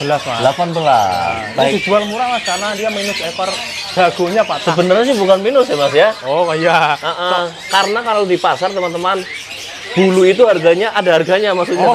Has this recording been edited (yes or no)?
no